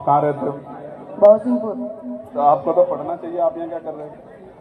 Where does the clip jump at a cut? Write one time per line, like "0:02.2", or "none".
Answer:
none